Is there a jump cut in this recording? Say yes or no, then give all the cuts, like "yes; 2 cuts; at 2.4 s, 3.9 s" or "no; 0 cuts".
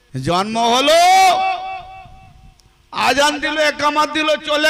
no; 0 cuts